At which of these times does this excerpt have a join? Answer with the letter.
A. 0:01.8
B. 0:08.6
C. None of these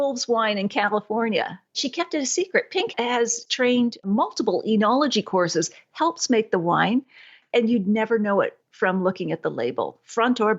A